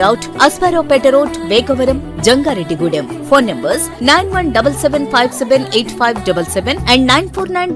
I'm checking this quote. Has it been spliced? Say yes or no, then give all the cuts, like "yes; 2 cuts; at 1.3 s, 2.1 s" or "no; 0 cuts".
no; 0 cuts